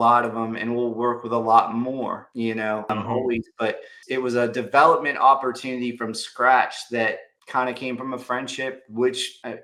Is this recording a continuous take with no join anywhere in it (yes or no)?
yes